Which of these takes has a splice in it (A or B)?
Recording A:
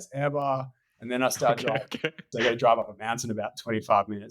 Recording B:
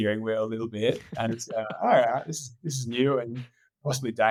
A